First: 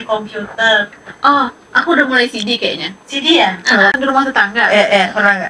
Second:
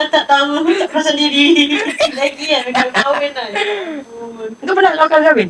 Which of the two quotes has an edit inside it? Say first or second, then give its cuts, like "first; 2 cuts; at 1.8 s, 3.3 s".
first; 1 cut; at 3.9 s